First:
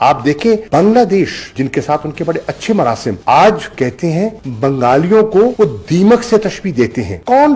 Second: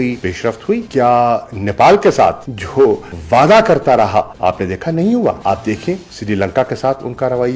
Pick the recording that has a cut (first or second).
second